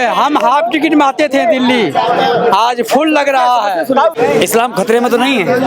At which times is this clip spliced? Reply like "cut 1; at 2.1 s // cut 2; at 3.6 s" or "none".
cut 1; at 4.2 s